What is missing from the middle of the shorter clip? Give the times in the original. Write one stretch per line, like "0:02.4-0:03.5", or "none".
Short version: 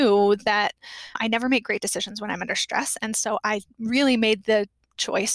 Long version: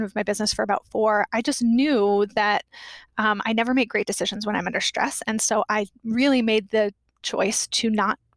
0:03.1-0:03.4